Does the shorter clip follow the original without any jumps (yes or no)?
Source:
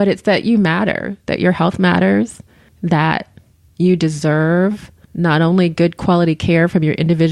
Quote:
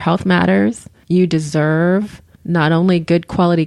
no